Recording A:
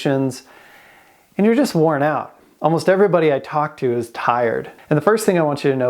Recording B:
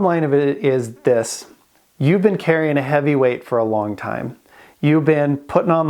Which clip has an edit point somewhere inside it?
A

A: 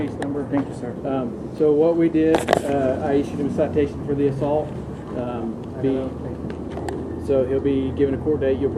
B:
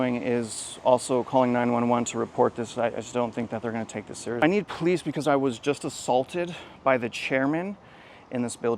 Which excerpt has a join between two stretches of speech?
B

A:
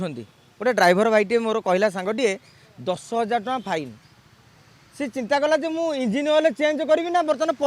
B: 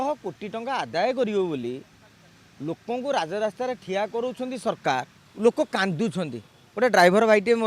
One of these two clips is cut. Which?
B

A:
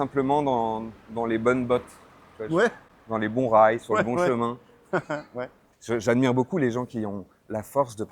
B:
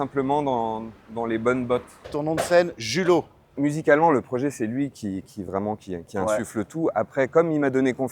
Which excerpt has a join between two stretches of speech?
B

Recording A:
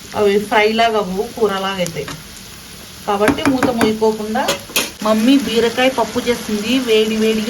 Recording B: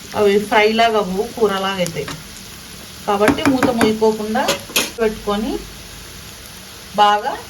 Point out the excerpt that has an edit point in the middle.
A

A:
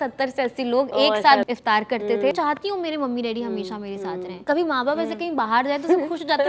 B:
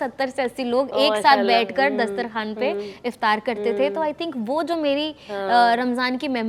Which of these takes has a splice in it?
A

